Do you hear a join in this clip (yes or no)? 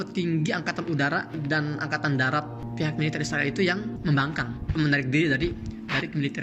yes